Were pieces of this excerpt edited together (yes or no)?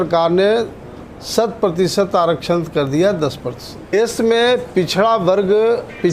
yes